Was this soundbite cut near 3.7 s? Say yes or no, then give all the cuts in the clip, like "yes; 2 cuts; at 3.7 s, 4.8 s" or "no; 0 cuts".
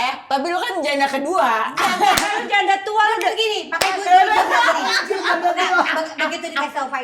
no; 0 cuts